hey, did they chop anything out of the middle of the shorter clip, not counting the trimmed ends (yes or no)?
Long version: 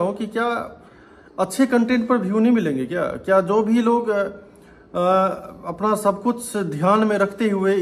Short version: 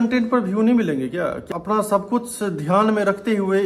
yes